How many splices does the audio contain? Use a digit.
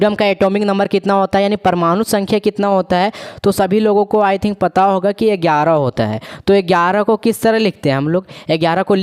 0